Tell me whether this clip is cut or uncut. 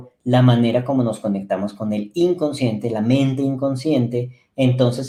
uncut